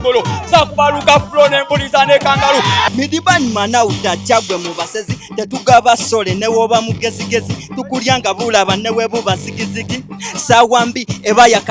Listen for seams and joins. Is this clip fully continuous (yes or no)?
no